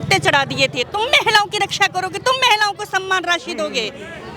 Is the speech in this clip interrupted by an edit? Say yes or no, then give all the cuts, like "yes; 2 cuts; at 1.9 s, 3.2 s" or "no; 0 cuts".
no; 0 cuts